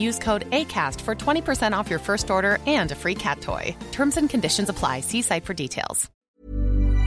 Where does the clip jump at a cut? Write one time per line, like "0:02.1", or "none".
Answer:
0:06.1